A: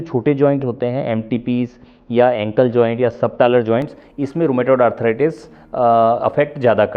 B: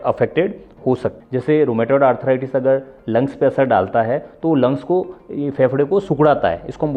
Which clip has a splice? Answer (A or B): B